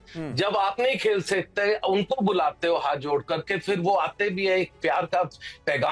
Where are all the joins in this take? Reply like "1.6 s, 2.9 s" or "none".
none